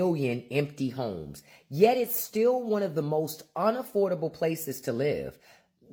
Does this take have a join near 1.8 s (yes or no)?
no